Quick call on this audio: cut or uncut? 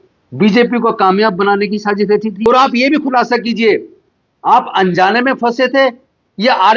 cut